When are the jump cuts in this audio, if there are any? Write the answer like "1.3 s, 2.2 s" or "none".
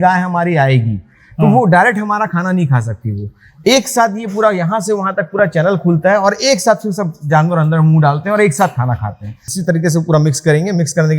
9.5 s